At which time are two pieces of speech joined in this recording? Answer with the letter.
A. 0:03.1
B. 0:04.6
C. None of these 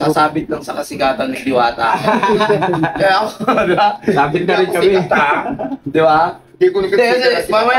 C